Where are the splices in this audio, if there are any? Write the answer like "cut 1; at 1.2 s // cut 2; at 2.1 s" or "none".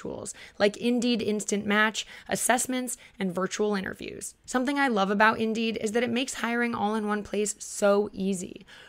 cut 1; at 4.3 s